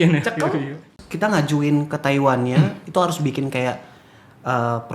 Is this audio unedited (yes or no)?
no